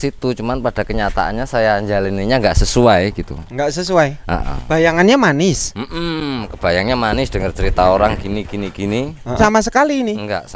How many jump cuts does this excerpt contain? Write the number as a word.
one